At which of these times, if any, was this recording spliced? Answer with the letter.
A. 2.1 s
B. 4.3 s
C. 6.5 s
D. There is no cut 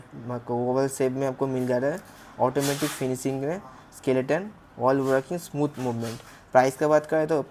D